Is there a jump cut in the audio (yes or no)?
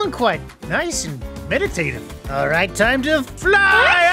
no